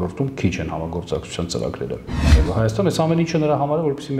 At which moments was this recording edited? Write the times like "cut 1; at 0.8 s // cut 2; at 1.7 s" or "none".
cut 1; at 2.3 s